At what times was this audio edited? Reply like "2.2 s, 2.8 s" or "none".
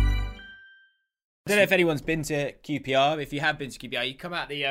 1.5 s